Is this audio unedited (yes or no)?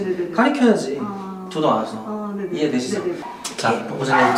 yes